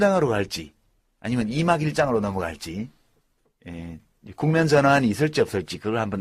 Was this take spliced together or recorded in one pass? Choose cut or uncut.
cut